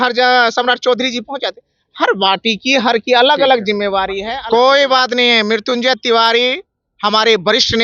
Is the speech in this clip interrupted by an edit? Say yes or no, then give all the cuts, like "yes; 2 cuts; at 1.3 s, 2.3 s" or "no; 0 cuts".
yes; 1 cut; at 4.2 s